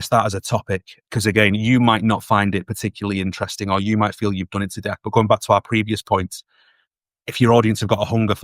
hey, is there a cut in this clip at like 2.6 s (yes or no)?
no